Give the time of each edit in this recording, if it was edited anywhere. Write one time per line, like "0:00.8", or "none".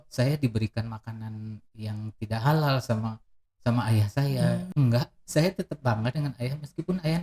0:04.7